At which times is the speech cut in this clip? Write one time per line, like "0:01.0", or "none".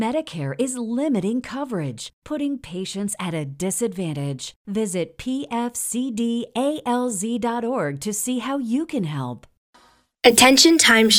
0:09.9